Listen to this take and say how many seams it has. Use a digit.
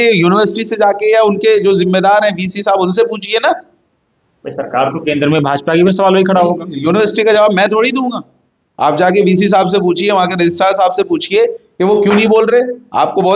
0